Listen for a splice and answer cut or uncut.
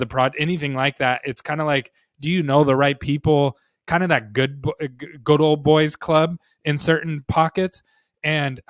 uncut